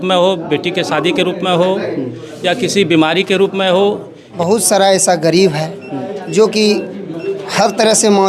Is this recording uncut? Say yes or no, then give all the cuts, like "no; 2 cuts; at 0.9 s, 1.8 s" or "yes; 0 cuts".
no; 1 cut; at 4.3 s